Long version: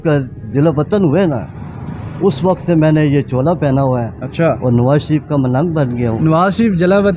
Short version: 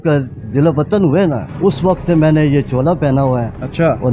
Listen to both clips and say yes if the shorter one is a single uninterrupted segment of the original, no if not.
no